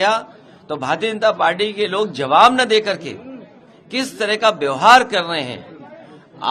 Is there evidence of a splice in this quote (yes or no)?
no